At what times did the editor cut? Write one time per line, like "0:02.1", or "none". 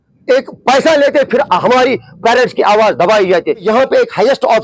0:03.6